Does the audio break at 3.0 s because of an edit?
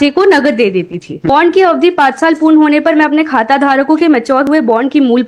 no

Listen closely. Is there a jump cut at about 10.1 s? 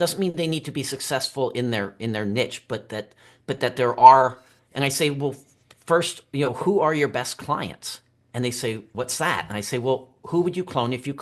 no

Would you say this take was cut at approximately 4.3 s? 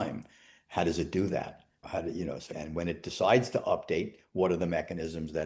no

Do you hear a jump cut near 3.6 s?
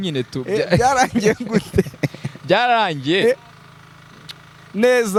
no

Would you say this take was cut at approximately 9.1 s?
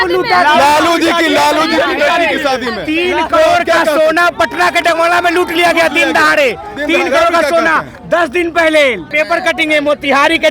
yes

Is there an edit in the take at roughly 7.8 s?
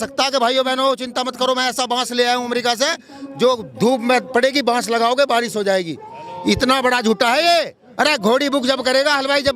yes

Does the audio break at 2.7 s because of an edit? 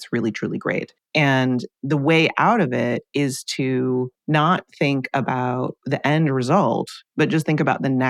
no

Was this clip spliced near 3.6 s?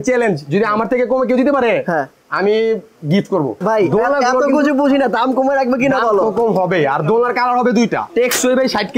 yes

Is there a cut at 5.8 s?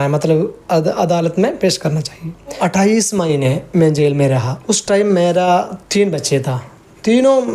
no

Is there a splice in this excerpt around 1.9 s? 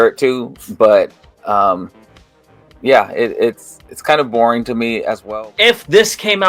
no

